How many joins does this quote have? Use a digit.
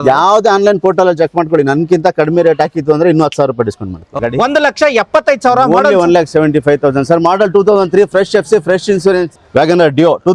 2